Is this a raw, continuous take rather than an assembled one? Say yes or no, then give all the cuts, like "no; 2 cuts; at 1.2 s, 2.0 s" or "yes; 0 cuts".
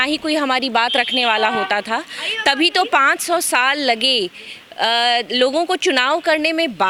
yes; 0 cuts